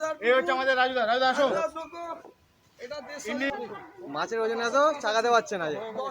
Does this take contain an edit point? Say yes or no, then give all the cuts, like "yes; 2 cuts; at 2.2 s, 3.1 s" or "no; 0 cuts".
yes; 1 cut; at 3.5 s